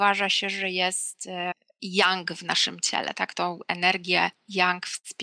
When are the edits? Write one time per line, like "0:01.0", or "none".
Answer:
0:01.7